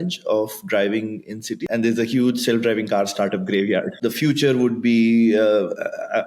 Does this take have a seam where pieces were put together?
yes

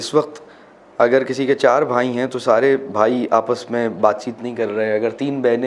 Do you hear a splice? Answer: no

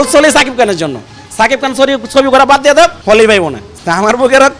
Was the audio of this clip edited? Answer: yes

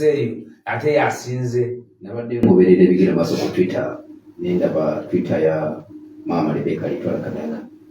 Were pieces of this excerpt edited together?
no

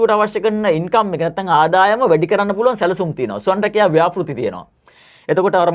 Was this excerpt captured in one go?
yes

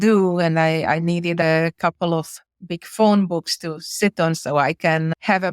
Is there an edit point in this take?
yes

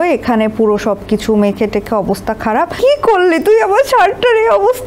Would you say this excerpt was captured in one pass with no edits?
no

